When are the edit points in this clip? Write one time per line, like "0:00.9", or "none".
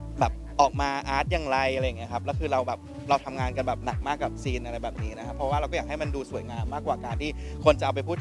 none